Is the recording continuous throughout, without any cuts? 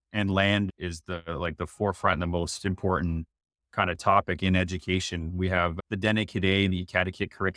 yes; 0 cuts

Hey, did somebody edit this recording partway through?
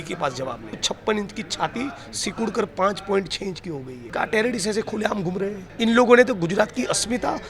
yes; 3 cuts; at 0.8 s, 4.0 s, 5.6 s

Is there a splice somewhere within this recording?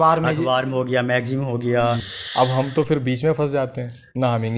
yes; 1 cut; at 2.1 s

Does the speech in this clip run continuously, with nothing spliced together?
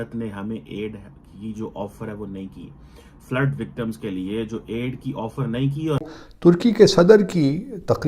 no; 1 cut; at 6.1 s

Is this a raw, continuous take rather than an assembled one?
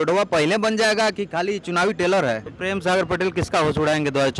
no; 1 cut; at 2.5 s

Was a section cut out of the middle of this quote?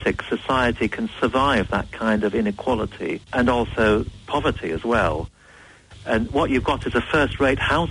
yes; 1 cut; at 3.3 s

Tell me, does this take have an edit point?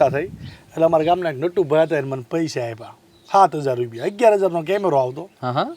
no; 0 cuts

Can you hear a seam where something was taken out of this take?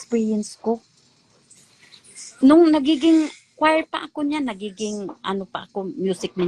no; 0 cuts

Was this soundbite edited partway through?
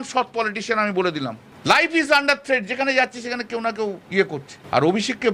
yes; 2 cuts; at 1.5 s, 4.2 s

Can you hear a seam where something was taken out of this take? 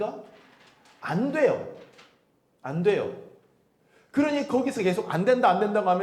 no; 0 cuts

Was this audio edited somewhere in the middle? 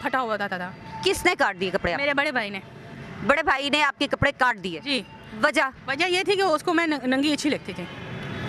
no; 0 cuts

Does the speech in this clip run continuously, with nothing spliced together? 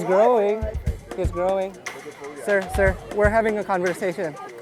yes; 0 cuts

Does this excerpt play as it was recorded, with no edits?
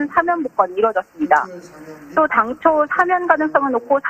no; 1 cut; at 2.7 s

